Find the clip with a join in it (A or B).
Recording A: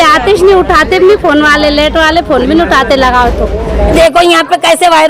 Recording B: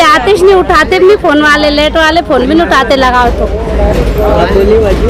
A